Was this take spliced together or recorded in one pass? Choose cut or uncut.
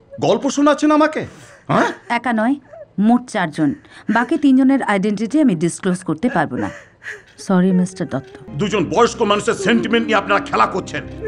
cut